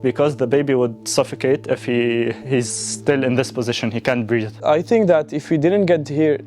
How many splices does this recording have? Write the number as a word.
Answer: one